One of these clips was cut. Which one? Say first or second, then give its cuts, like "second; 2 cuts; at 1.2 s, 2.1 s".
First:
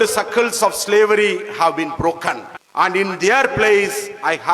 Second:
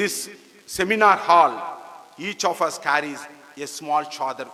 first; 1 cut; at 2.5 s